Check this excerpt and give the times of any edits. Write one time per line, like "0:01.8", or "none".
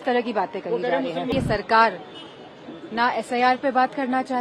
0:01.3

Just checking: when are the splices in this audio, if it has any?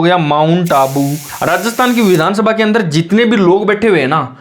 0:01.3

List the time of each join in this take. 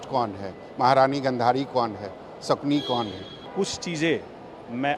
0:03.5

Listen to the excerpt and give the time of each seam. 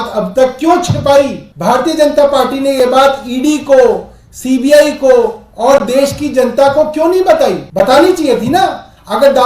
0:01.4
0:07.6

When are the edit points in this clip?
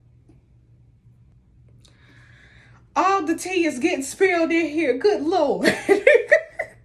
none

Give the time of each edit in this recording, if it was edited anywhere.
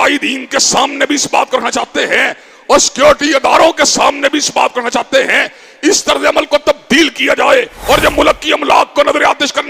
0:07.8

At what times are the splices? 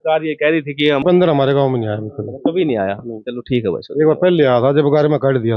0:01.0

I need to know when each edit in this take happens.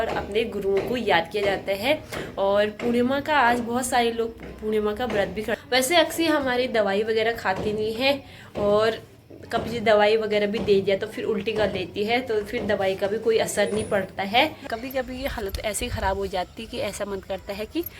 0:05.6
0:14.6

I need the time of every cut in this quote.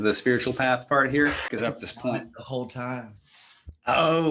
0:01.5

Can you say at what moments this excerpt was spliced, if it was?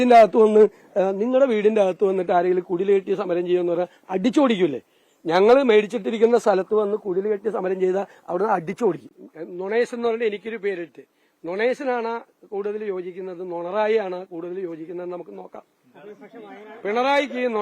0:09.2

